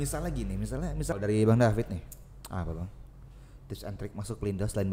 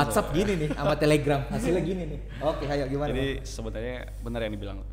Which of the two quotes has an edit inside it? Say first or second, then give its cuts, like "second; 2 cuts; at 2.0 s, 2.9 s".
first; 1 cut; at 1.1 s